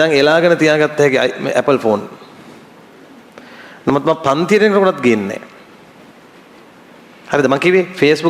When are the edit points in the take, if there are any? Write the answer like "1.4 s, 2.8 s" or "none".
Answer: none